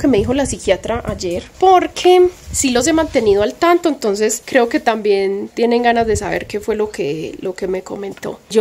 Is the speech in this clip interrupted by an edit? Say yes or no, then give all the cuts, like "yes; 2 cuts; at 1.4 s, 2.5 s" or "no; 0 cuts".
no; 0 cuts